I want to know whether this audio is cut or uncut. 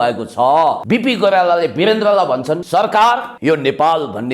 cut